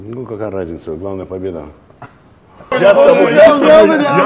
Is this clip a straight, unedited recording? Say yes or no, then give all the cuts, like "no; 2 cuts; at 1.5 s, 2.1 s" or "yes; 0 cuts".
no; 1 cut; at 2.7 s